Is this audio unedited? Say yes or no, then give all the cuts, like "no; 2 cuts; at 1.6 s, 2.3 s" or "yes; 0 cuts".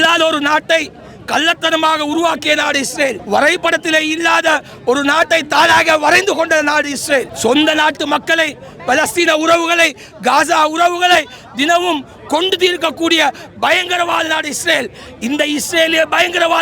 yes; 0 cuts